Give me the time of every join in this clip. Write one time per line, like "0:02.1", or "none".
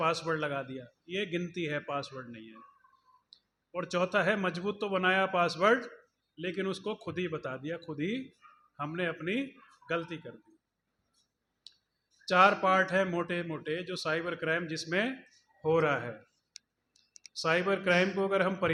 none